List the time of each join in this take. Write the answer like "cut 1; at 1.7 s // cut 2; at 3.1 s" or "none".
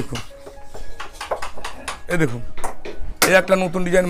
cut 1; at 2.0 s